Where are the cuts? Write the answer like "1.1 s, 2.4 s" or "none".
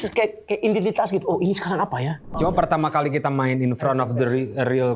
2.2 s